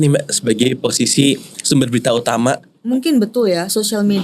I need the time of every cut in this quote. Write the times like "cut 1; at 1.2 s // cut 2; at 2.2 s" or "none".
cut 1; at 2.7 s